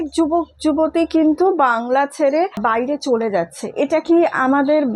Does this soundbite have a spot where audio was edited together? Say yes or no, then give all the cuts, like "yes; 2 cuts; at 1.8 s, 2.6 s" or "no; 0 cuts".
yes; 1 cut; at 2.6 s